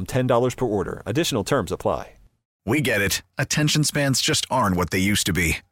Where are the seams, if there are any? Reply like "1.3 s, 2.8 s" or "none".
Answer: 2.5 s